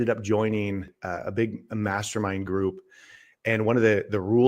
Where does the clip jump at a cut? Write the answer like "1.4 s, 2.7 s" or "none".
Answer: 0.9 s

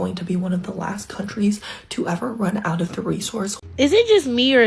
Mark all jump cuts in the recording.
3.6 s

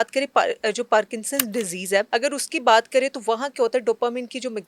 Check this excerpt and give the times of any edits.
2.1 s

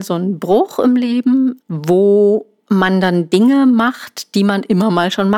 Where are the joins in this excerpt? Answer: 1.6 s, 2.5 s

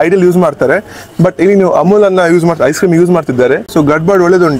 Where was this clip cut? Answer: 3.7 s

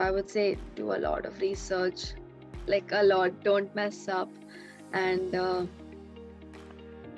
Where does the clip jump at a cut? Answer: none

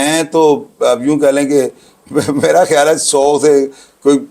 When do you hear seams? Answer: none

